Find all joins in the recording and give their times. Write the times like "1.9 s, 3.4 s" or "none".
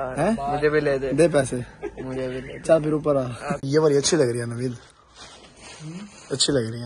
3.6 s

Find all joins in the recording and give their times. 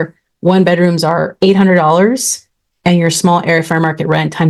none

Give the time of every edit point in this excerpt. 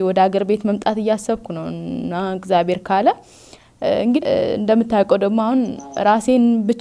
4.2 s

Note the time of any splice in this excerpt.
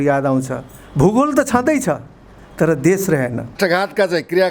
3.5 s

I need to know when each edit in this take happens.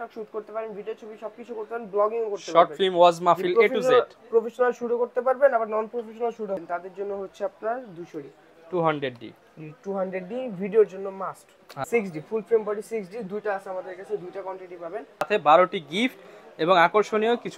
6.6 s, 11.7 s, 15.3 s

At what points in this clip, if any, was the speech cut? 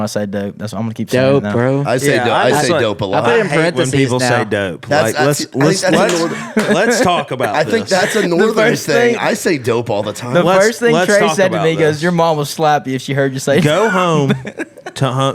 none

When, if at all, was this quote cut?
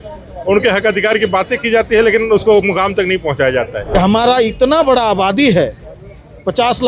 3.9 s

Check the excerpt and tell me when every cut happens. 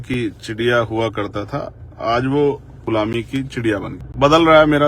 2.8 s, 4.0 s

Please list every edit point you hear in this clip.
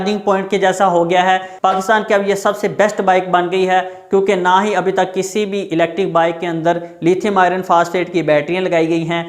1.5 s

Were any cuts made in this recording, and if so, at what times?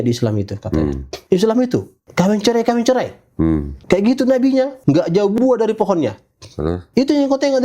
1.1 s, 2.0 s, 3.7 s, 4.8 s, 6.8 s

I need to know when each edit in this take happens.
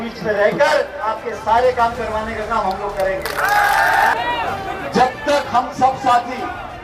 4.1 s

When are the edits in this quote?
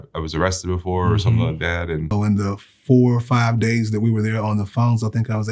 2.1 s

